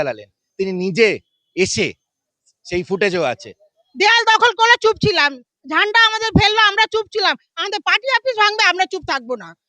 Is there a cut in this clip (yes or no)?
yes